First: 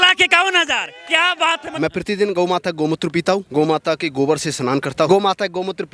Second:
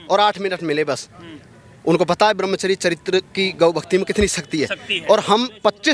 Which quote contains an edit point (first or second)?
first